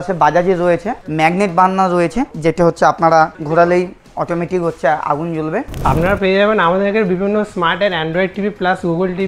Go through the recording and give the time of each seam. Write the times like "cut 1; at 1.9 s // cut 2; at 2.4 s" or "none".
cut 1; at 1.0 s // cut 2; at 2.3 s // cut 3; at 3.4 s // cut 4; at 4.0 s // cut 5; at 5.7 s

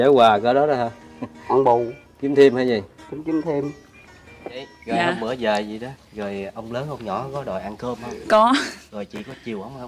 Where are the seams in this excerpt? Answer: cut 1; at 4.7 s

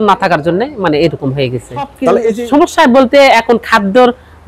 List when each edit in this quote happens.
cut 1; at 2.3 s

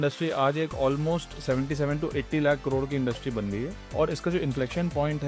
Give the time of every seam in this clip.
cut 1; at 3.9 s

